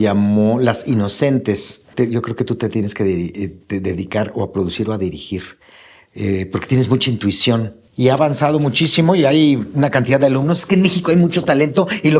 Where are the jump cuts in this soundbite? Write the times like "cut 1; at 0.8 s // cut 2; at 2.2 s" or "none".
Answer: cut 1; at 1.9 s // cut 2; at 7.8 s